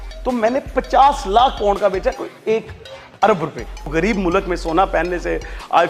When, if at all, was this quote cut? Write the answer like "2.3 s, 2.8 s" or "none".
3.9 s